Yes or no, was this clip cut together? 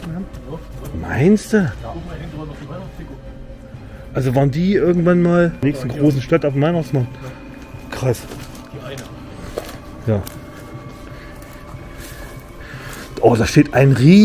no